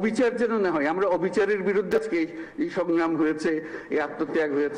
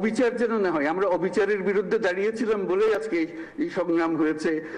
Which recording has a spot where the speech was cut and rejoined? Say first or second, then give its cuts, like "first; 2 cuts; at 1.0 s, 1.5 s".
first; 1 cut; at 1.9 s